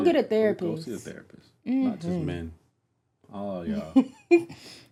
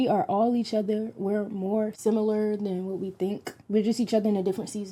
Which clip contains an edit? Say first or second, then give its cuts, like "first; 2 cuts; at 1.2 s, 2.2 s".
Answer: second; 2 cuts; at 1.9 s, 3.6 s